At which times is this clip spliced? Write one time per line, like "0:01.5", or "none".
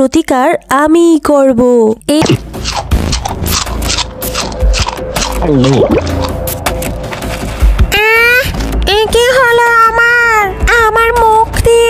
0:02.2